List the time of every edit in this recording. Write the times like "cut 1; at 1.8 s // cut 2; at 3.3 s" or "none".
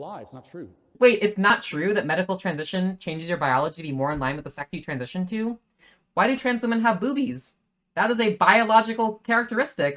none